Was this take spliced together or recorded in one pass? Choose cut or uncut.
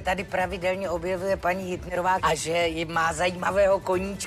cut